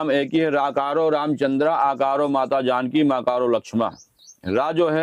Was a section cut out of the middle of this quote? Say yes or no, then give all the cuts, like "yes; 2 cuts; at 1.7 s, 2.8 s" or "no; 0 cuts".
no; 0 cuts